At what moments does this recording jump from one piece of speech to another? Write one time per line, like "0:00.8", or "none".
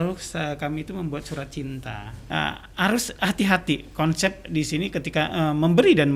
0:02.1